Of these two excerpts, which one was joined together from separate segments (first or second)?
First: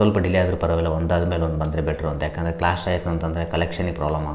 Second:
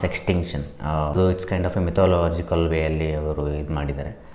second